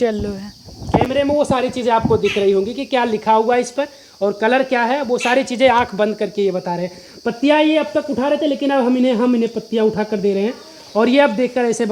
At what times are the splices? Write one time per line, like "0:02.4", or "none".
none